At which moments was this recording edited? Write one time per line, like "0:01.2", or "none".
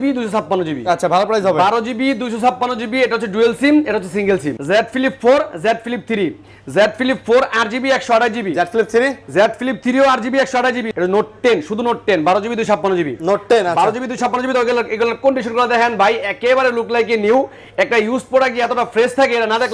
0:04.5
0:10.9